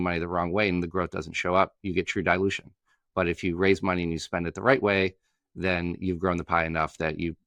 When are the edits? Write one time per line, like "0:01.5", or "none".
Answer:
none